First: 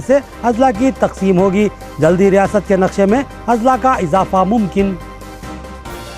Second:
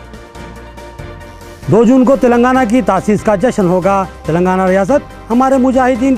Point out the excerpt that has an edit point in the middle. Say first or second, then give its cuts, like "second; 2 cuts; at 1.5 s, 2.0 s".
second; 1 cut; at 0.9 s